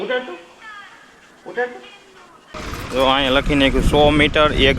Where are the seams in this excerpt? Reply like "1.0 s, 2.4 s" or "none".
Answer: 2.5 s